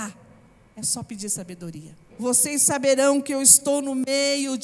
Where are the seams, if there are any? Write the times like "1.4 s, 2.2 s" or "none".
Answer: 2.0 s

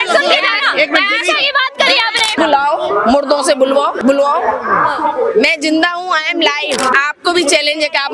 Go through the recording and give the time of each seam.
2.4 s, 4.0 s, 6.9 s

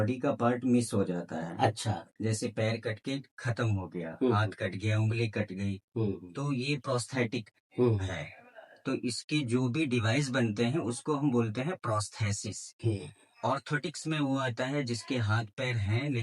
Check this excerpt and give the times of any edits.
none

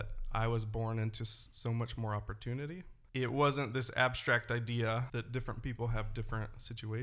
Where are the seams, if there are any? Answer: 2.9 s, 5.1 s

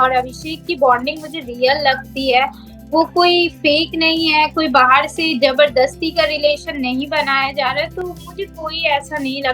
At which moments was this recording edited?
none

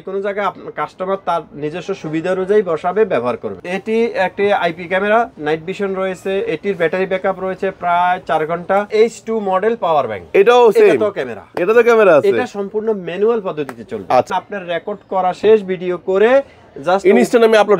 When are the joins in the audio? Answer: 3.5 s, 8.9 s, 14.3 s

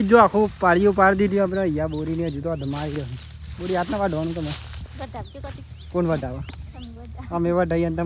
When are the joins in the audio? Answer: none

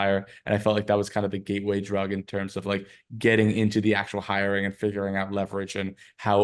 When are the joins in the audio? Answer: none

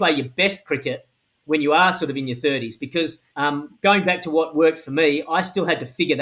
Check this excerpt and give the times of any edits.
3.2 s

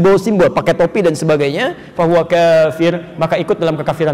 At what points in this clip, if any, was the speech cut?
none

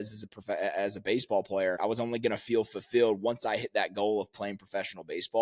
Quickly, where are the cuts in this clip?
1.8 s

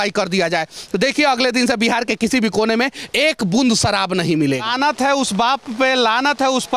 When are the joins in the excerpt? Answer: 4.7 s

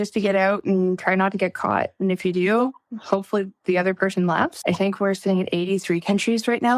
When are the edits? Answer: 4.6 s

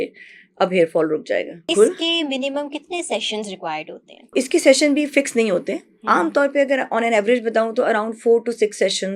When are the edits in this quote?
1.7 s, 4.3 s

